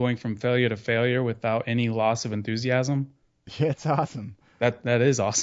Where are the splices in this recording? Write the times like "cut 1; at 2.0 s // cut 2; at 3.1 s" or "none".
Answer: none

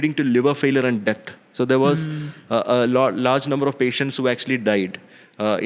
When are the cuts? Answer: none

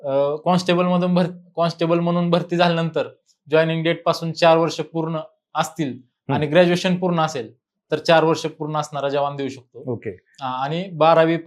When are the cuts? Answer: none

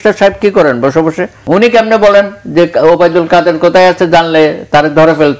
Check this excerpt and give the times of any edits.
cut 1; at 1.4 s

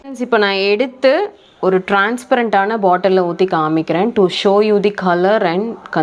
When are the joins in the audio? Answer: none

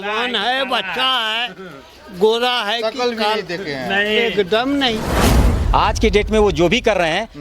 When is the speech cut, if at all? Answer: cut 1; at 5.5 s

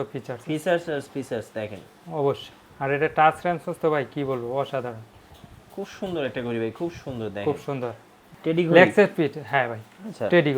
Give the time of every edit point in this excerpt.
cut 1; at 8.3 s

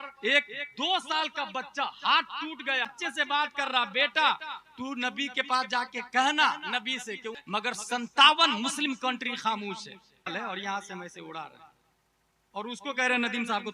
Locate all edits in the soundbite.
cut 1; at 3.0 s // cut 2; at 7.3 s // cut 3; at 10.3 s

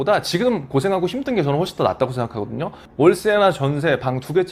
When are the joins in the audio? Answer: none

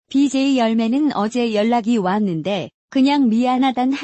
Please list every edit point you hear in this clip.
cut 1; at 0.9 s

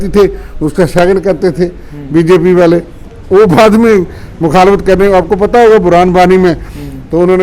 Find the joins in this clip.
none

